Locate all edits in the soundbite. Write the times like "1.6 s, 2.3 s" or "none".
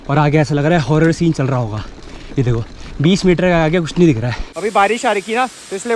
4.4 s